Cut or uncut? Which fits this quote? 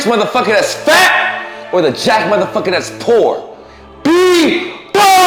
uncut